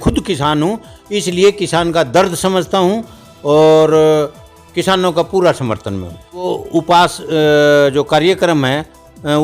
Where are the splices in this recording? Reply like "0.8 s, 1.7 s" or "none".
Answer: 6.5 s